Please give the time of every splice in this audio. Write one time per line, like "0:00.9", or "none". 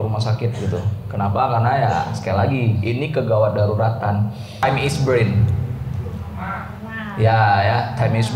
0:04.6